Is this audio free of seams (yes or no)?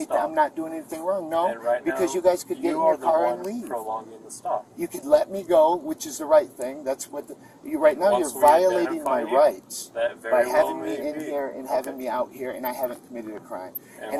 yes